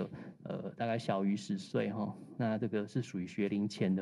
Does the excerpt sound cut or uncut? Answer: uncut